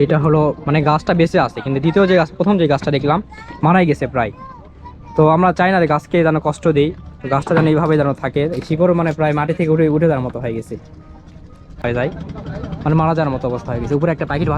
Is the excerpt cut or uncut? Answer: cut